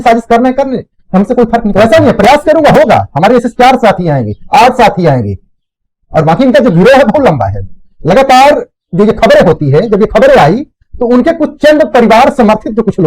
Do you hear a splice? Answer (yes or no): yes